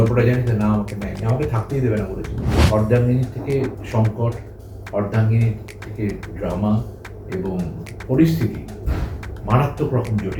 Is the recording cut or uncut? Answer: cut